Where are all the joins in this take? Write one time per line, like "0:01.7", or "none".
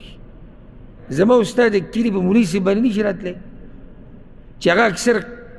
0:01.0